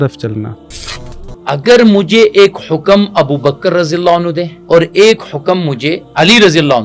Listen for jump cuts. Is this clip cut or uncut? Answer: cut